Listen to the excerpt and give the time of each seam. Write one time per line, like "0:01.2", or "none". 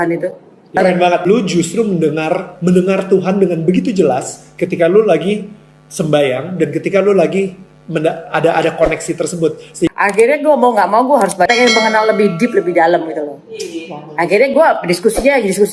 0:00.8
0:09.9
0:11.5